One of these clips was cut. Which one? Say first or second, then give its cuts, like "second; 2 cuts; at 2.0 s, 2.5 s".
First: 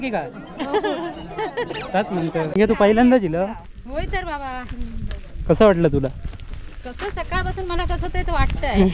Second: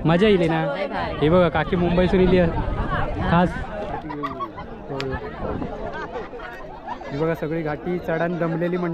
first; 1 cut; at 2.5 s